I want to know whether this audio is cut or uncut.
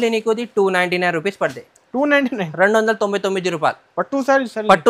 uncut